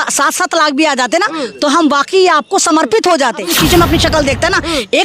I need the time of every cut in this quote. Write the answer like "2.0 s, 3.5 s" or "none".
3.5 s